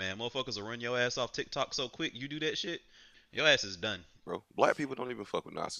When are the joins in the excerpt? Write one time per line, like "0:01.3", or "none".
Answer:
0:03.2
0:04.2